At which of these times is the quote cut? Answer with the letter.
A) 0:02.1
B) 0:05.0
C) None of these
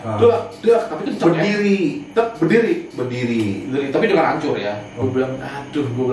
B